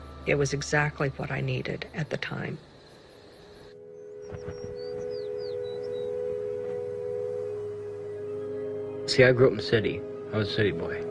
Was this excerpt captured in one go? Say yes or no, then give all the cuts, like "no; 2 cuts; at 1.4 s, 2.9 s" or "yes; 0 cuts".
no; 1 cut; at 2.8 s